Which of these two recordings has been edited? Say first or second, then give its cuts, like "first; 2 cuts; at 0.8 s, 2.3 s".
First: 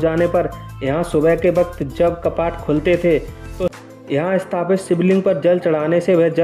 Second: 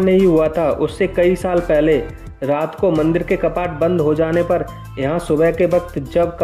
first; 1 cut; at 3.7 s